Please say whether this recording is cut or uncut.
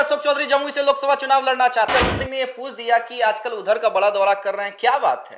cut